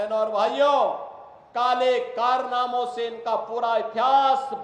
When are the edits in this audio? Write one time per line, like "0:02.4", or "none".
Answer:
none